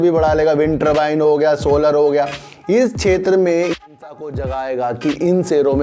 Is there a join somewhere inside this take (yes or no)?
yes